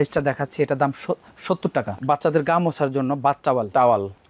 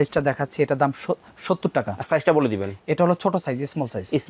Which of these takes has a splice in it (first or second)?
first